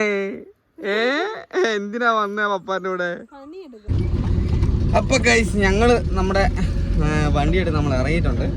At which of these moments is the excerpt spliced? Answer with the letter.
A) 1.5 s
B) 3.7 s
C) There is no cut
B